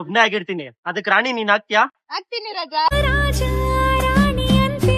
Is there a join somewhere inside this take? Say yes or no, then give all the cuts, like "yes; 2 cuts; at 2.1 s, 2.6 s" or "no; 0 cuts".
no; 0 cuts